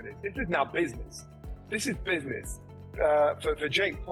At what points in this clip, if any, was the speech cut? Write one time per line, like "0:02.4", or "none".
none